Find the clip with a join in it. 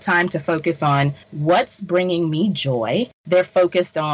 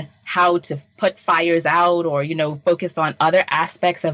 first; 2 cuts; at 1.2 s, 3.2 s

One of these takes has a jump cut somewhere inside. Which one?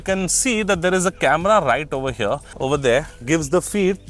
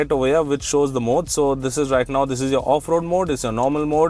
first; 1 cut; at 2.5 s

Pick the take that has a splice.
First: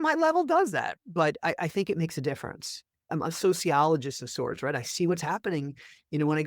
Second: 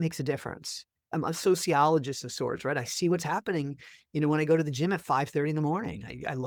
first; 1 cut; at 1.0 s

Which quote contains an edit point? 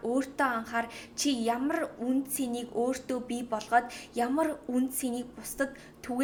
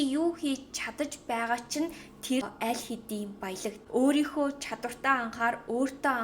second; 2 cuts; at 2.5 s, 3.8 s

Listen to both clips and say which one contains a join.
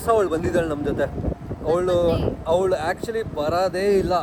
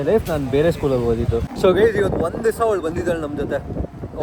second; 1 cut; at 1.5 s

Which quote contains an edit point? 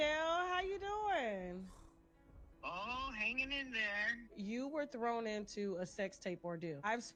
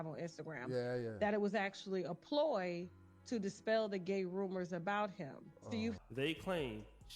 second; 1 cut; at 6.0 s

